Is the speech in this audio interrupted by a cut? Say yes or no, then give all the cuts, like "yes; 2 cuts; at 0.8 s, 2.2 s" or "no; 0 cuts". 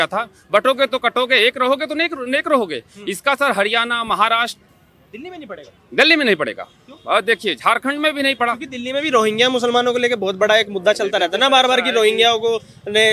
no; 0 cuts